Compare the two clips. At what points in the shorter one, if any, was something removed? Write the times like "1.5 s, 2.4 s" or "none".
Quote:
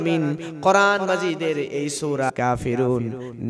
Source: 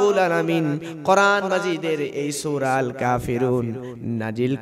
2.3 s